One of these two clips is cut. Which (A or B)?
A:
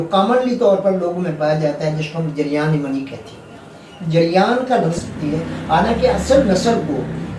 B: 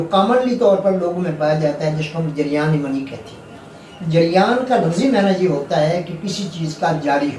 A